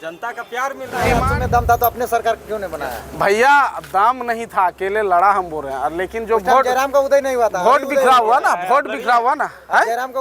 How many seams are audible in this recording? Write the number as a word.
one